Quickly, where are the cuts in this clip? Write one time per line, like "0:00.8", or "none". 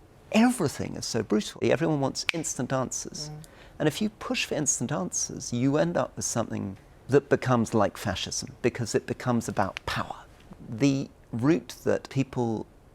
0:01.5
0:07.0
0:10.5
0:12.1